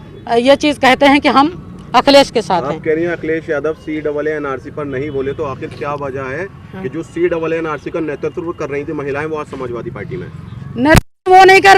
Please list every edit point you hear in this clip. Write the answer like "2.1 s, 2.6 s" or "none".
none